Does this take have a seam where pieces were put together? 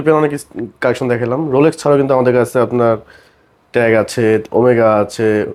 no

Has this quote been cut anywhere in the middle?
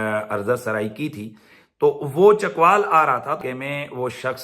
yes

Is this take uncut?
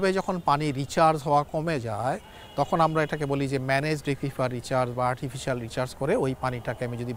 yes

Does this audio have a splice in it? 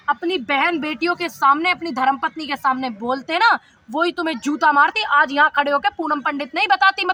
no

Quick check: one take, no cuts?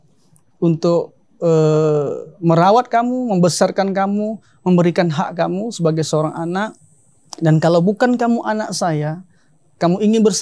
yes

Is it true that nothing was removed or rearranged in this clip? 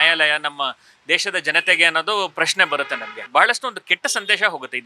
no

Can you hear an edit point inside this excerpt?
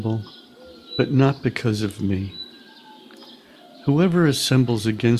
yes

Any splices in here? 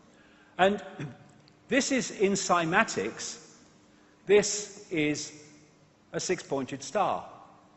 yes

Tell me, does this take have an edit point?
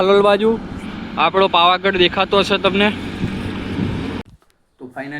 yes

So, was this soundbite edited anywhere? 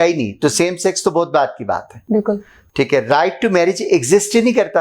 no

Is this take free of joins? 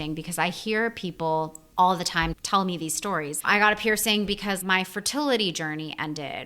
no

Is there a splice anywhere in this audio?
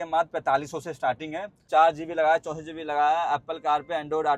yes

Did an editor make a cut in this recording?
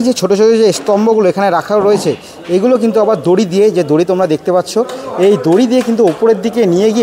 no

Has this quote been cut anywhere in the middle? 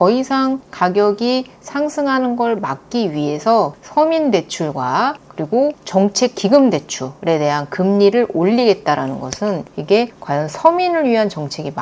no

